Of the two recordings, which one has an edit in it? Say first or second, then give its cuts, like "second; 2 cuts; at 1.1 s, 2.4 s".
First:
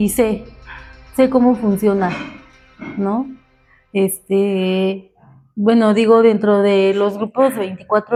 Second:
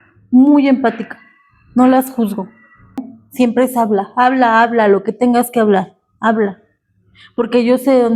second; 1 cut; at 3.1 s